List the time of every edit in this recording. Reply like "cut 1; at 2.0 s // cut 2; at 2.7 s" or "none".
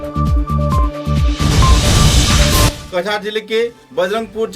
cut 1; at 2.7 s